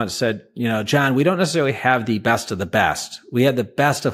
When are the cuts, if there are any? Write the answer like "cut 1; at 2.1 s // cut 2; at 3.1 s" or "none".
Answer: none